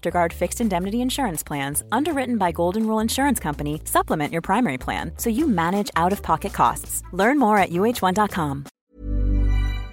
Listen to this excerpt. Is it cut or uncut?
cut